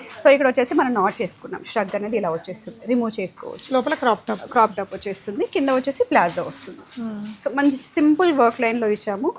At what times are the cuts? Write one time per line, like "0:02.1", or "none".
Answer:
none